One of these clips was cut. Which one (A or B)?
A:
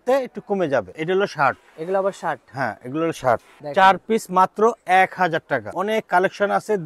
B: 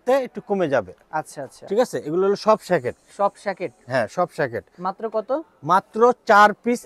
A